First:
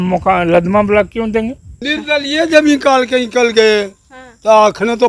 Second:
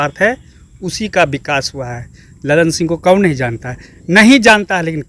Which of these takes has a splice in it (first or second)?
first